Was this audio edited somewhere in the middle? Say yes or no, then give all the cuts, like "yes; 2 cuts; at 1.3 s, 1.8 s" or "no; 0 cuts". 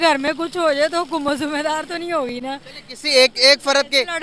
no; 0 cuts